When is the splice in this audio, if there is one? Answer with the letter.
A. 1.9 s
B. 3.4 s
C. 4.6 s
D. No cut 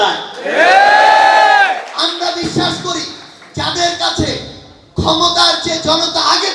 D